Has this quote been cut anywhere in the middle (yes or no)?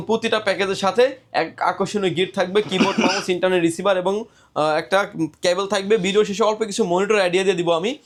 no